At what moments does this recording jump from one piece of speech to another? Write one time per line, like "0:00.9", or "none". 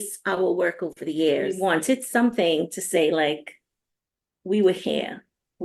0:01.6

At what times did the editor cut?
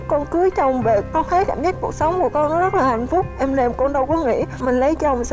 none

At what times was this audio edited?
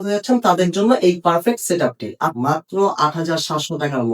0:02.3

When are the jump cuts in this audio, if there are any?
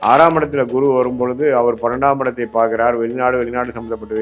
none

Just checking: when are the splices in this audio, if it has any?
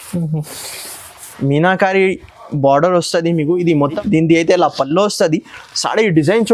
0:04.0

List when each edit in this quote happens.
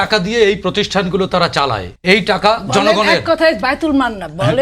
0:01.9

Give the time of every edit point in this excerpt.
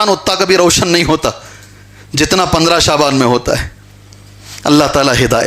none

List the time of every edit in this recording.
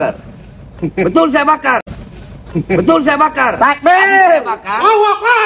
none

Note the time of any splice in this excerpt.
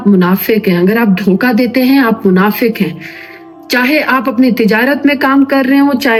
none

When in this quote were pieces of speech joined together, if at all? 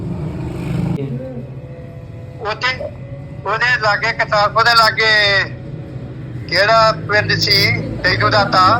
0:01.0

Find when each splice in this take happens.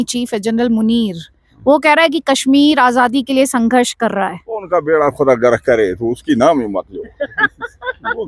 none

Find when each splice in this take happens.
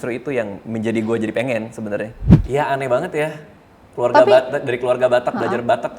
0:02.3

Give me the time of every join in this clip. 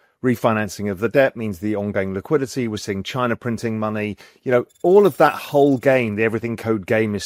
none

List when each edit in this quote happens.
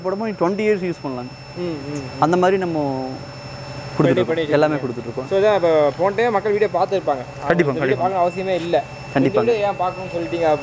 none

